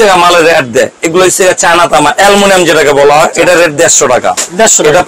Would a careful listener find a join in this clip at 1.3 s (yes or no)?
no